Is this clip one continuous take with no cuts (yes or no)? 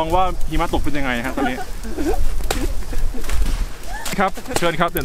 no